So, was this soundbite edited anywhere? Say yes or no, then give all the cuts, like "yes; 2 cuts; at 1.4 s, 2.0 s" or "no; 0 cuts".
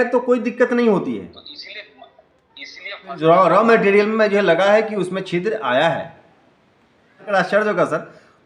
yes; 2 cuts; at 3.1 s, 7.2 s